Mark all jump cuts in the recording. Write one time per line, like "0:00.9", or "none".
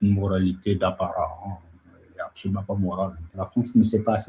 0:03.4